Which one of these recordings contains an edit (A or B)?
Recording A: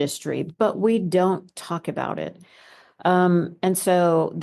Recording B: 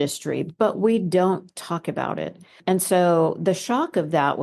B